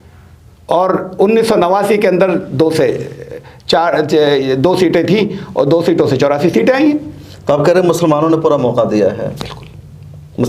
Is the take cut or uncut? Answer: uncut